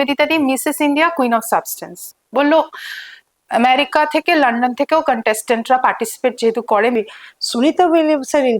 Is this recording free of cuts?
no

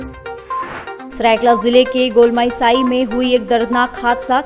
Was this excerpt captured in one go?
yes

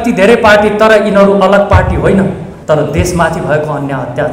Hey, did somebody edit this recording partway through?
yes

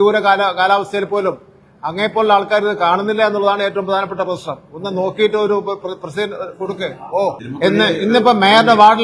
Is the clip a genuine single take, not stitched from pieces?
no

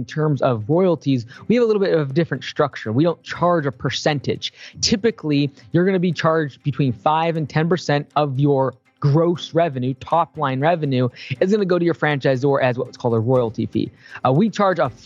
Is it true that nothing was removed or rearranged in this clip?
yes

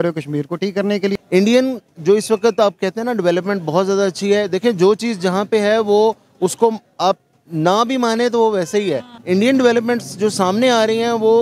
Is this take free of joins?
no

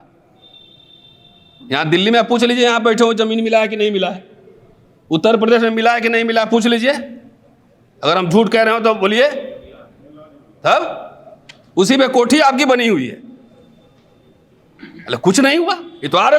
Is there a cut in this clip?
no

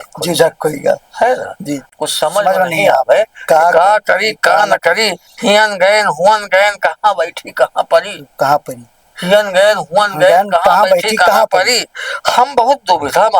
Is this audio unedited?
no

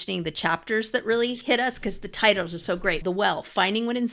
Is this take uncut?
no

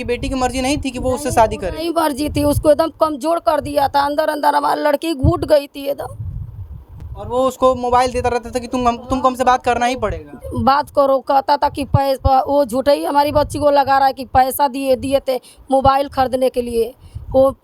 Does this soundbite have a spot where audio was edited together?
no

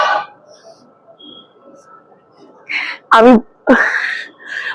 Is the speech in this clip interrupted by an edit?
no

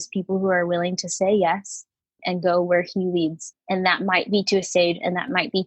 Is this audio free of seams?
no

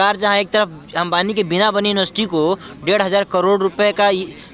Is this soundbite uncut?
yes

